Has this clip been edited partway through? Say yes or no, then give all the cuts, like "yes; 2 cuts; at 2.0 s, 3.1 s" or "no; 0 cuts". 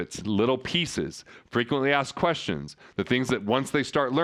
no; 0 cuts